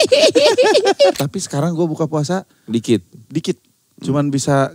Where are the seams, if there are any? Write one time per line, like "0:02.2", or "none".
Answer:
0:01.2